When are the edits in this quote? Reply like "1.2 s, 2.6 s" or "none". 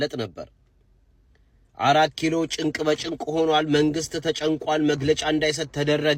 none